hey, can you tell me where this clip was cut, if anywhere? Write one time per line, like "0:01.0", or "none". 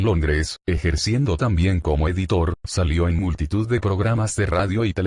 0:03.4